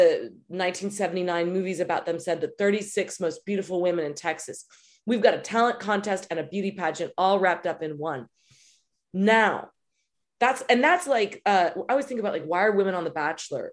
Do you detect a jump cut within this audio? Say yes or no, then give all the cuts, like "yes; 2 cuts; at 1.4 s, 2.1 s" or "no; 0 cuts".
no; 0 cuts